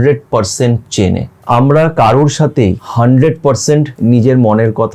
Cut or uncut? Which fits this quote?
cut